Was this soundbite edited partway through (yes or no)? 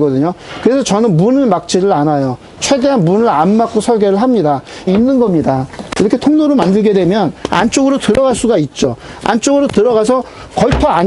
yes